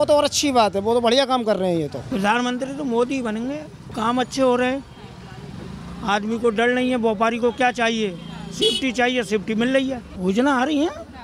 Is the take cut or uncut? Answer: cut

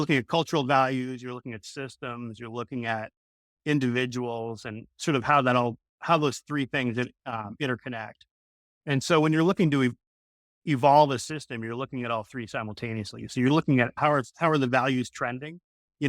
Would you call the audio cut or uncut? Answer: cut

